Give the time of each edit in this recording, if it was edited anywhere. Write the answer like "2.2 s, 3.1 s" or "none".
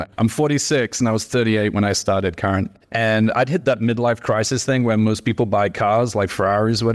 none